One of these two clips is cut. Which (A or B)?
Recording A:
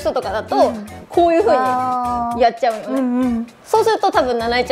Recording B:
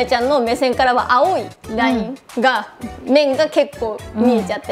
A